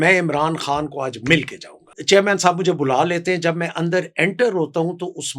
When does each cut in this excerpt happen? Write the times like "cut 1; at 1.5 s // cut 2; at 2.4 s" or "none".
cut 1; at 1.9 s